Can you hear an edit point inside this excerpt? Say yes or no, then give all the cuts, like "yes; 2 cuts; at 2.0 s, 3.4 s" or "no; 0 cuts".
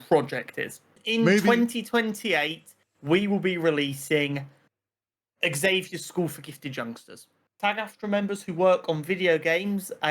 yes; 2 cuts; at 1.0 s, 7.5 s